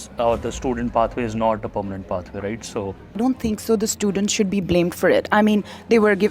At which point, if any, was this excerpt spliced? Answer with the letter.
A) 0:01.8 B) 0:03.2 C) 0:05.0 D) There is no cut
B